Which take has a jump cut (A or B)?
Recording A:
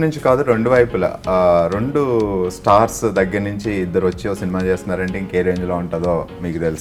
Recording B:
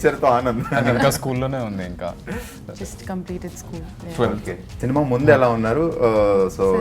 B